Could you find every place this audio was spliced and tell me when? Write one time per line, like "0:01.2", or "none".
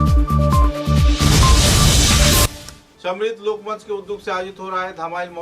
0:02.5